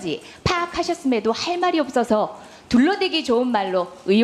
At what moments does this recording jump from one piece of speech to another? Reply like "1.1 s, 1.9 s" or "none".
2.6 s